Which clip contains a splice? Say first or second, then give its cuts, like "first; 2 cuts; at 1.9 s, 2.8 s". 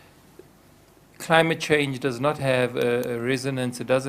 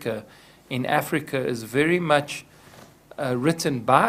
first; 1 cut; at 1.1 s